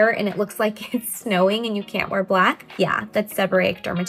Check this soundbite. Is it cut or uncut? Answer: uncut